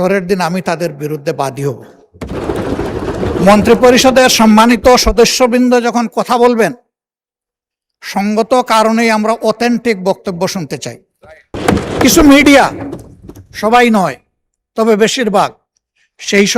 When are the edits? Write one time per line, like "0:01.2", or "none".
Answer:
0:02.3
0:11.5